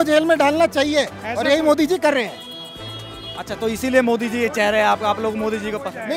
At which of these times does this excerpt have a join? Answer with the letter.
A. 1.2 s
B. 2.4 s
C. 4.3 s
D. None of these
D